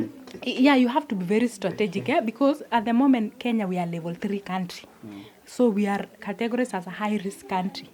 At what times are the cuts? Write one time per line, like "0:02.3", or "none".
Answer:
none

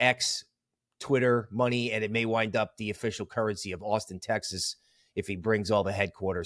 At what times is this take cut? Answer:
none

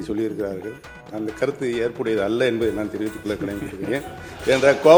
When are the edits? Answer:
none

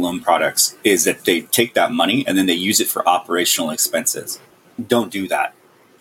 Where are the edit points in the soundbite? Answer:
0:01.2
0:04.7

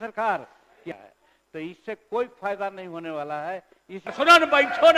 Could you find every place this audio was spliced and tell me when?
0:01.0
0:04.0

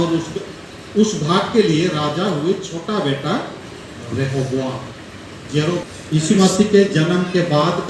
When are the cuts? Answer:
0:05.8

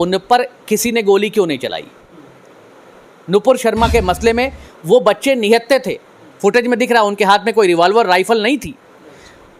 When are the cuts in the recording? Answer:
none

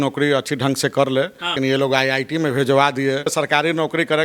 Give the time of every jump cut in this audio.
0:01.5
0:03.3

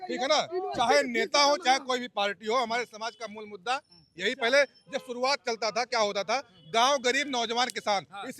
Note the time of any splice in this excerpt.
none

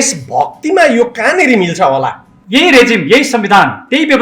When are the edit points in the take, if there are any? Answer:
0:02.3

